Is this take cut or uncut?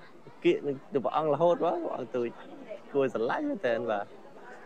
uncut